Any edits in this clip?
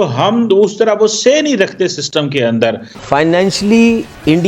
yes; 1 cut; at 2.9 s

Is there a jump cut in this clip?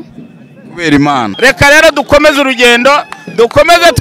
yes; 1 cut; at 1.3 s

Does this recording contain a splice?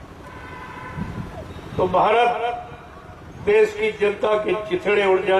no; 0 cuts

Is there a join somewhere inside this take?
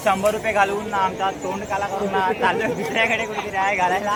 no; 0 cuts

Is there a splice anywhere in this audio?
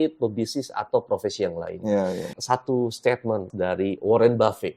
yes; 2 cuts; at 2.3 s, 3.5 s

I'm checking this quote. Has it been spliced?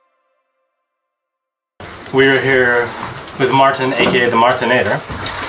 no; 0 cuts

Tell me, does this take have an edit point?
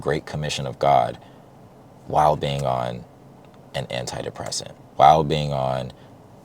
yes; 1 cut; at 4.8 s

